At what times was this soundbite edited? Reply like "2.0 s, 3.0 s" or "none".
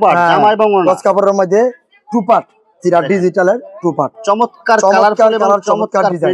none